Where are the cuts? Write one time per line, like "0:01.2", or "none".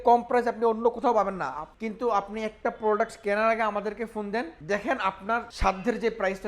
0:01.6
0:04.6
0:05.5